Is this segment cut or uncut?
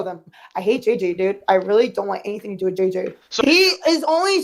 cut